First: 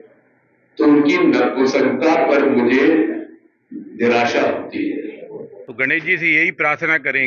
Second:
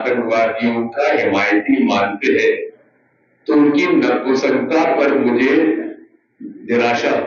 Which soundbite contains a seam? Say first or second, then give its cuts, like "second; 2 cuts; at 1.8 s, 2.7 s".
first; 1 cut; at 5.6 s